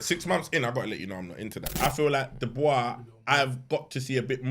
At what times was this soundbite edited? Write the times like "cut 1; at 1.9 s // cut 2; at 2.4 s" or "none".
cut 1; at 1.8 s